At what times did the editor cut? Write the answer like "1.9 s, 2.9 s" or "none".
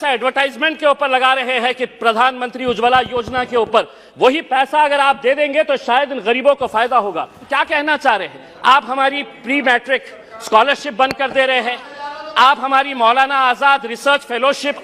7.5 s